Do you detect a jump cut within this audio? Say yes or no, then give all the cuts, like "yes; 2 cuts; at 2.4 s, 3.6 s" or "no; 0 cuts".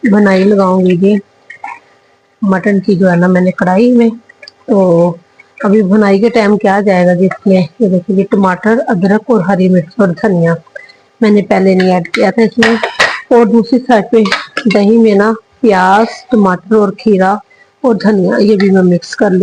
no; 0 cuts